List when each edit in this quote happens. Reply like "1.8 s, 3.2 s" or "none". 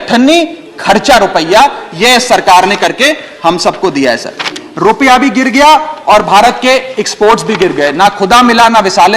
4.6 s